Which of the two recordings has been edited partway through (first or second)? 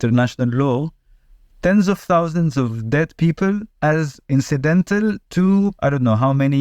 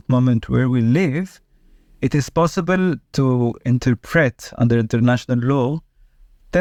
first